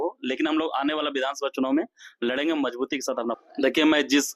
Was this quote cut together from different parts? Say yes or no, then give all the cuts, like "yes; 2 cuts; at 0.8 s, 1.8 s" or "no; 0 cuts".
yes; 1 cut; at 3.4 s